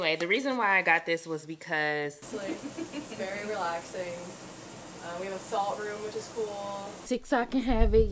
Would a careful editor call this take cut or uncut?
cut